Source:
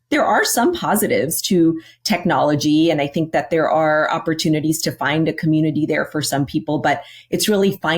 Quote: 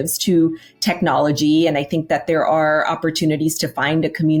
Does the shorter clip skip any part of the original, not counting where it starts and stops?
no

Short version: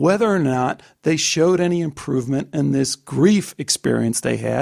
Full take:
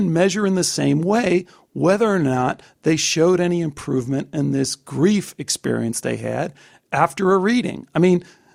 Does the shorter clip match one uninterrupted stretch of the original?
yes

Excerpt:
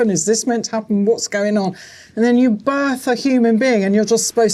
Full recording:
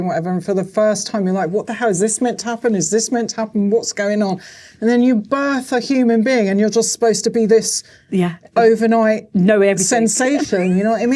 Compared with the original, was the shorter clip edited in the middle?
no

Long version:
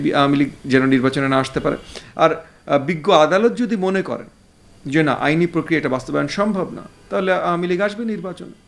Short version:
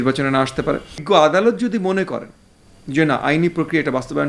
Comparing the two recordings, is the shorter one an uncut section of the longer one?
no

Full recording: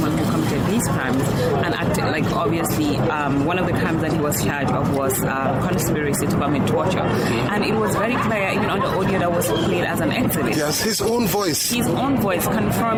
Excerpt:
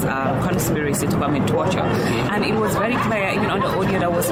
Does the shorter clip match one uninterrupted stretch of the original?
yes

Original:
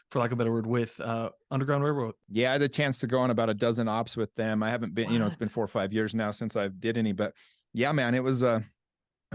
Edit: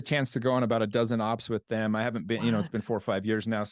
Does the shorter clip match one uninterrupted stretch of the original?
yes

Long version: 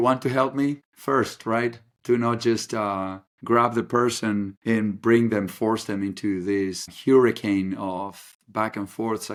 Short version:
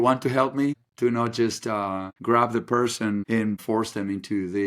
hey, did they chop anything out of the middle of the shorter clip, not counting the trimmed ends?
yes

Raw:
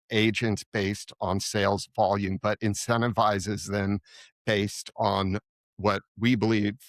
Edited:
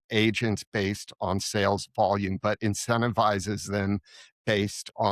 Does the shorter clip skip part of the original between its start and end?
no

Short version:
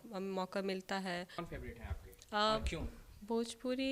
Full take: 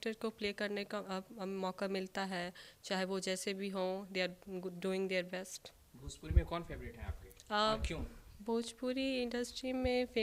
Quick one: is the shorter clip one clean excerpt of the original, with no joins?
no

